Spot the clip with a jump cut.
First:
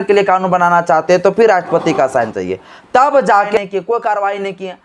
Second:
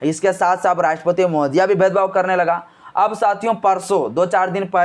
first; 1 cut; at 3.6 s

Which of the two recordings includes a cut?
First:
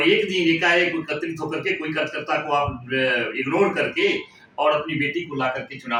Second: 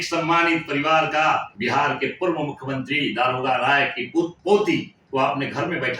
second; 3 cuts; at 1.5 s, 4.4 s, 5.0 s

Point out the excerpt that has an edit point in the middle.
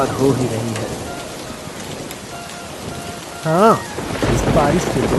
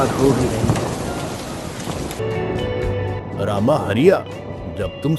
second; 1 cut; at 2.2 s

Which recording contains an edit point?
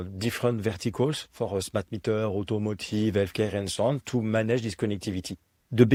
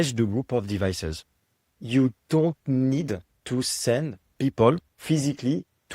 second; 3 cuts; at 3.3 s, 4.2 s, 4.9 s

